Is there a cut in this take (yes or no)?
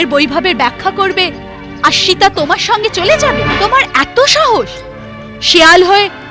yes